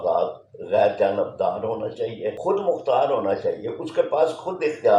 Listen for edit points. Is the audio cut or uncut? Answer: cut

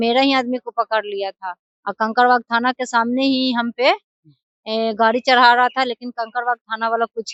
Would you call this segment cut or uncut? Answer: uncut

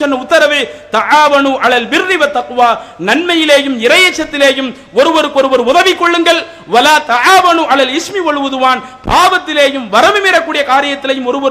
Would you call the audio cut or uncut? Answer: uncut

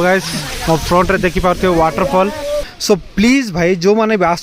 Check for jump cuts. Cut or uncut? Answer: cut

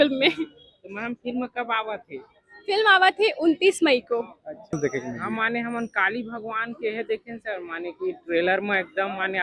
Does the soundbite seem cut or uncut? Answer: cut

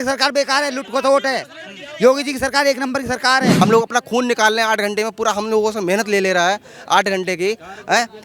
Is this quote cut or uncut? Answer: cut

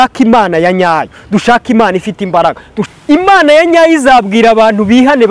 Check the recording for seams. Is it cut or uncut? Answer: cut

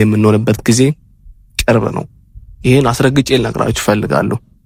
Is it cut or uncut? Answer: uncut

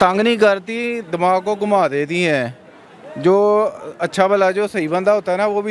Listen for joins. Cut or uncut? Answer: uncut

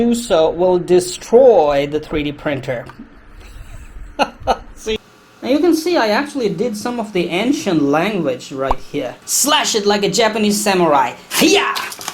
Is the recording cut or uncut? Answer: cut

